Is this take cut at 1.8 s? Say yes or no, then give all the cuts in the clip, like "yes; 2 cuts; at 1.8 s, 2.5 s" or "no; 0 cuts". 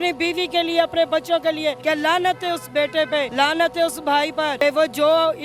yes; 3 cuts; at 1.8 s, 3.3 s, 4.6 s